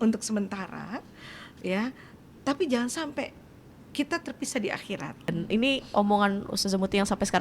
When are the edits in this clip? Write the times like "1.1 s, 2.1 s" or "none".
5.3 s